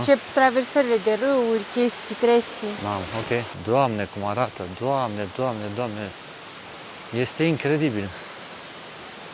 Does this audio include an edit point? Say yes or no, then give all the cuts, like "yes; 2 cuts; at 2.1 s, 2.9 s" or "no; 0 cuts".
yes; 1 cut; at 3.5 s